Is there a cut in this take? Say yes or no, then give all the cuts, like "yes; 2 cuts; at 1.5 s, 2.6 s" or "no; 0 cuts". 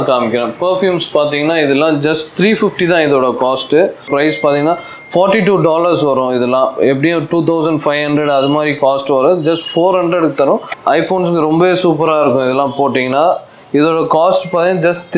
yes; 2 cuts; at 4.1 s, 10.7 s